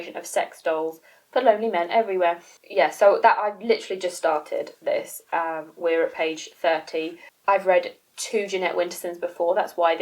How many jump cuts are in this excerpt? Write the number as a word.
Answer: zero